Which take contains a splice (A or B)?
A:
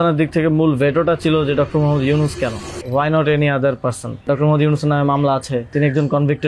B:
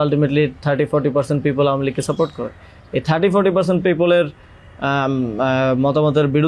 A